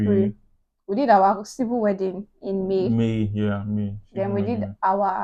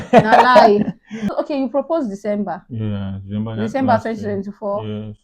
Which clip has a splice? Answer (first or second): second